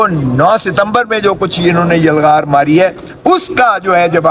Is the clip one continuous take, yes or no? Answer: yes